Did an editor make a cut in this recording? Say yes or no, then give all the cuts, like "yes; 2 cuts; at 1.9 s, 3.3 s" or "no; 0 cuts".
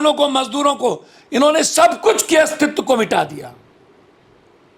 no; 0 cuts